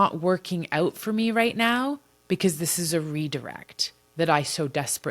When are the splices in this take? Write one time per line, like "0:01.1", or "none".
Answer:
none